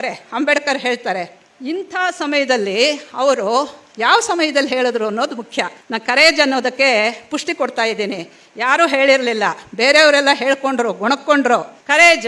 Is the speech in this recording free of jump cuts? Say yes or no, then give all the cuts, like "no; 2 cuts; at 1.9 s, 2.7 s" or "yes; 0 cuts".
yes; 0 cuts